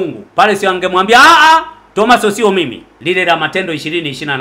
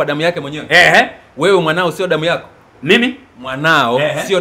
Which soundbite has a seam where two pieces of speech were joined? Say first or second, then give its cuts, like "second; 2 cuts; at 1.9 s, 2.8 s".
first; 1 cut; at 2.9 s